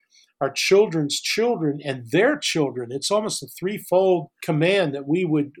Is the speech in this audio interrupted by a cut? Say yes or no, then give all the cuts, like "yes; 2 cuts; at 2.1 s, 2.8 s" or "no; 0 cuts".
yes; 1 cut; at 4.3 s